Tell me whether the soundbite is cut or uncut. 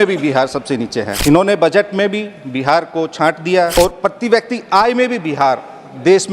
cut